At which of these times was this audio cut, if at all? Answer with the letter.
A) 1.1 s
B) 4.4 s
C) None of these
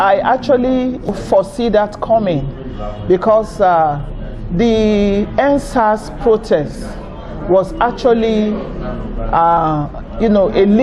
A